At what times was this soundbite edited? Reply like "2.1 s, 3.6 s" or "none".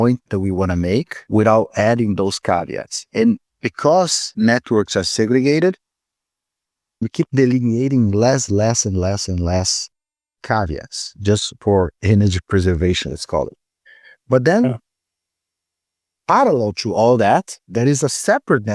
1.2 s, 4.2 s, 7.1 s